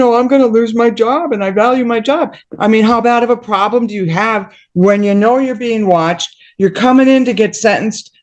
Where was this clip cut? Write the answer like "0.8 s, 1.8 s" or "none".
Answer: 2.4 s

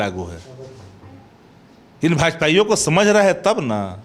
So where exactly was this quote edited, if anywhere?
none

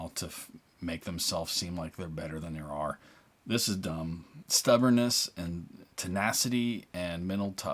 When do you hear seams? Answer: 4.3 s

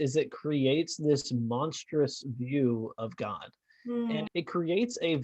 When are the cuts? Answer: 4.3 s

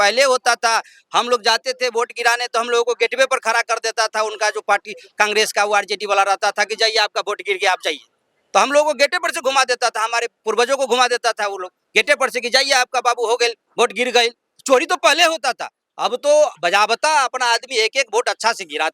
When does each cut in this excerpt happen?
none

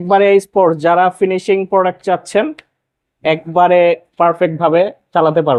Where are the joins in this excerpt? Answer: none

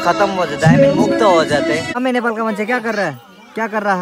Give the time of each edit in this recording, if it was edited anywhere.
1.9 s

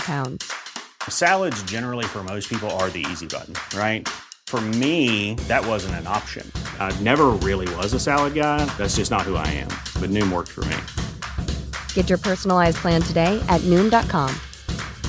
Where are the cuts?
none

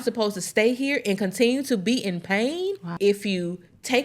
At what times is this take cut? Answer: 2.9 s

